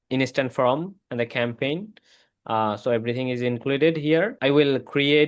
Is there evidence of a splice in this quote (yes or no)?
yes